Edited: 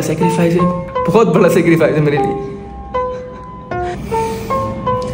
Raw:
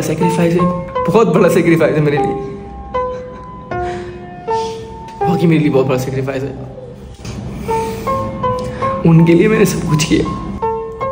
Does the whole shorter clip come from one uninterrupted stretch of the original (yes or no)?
no